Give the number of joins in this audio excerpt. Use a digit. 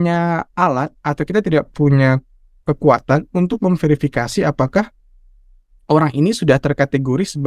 0